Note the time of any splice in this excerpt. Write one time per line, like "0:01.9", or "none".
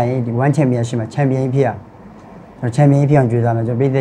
none